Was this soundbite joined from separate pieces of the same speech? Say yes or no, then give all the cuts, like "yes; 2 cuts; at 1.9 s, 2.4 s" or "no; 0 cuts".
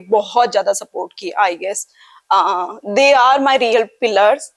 no; 0 cuts